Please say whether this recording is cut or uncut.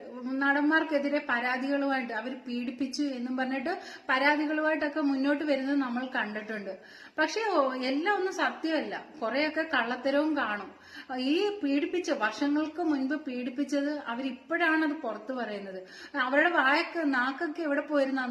uncut